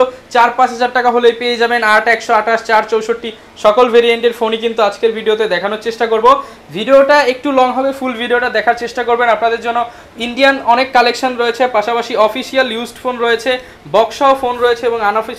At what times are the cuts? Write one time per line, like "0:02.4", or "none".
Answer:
none